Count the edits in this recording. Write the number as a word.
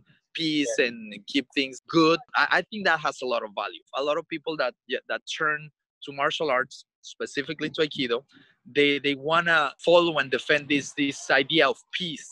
four